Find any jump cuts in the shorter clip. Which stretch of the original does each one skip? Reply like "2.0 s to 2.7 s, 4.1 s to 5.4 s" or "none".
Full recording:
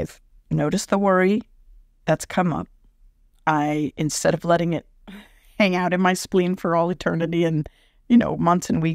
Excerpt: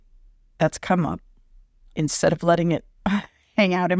3.4 s to 3.9 s